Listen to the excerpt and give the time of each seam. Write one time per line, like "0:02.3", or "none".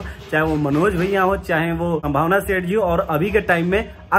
0:02.0

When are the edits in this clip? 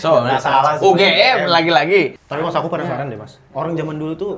0:02.2

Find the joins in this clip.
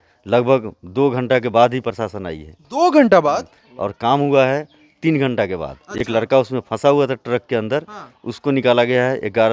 none

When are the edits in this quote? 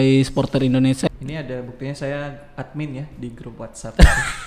0:01.1

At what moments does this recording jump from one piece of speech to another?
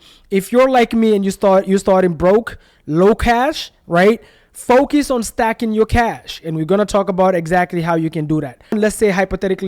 0:08.8

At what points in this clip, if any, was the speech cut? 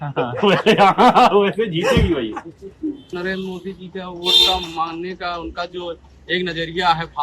0:03.1

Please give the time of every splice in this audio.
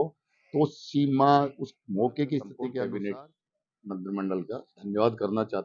0:02.7

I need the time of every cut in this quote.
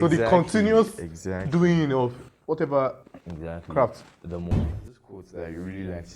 0:04.7

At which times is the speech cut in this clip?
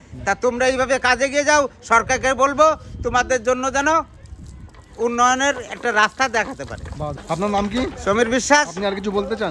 0:07.2

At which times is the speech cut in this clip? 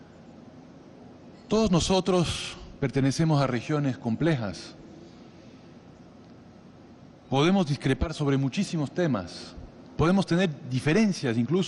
0:02.1

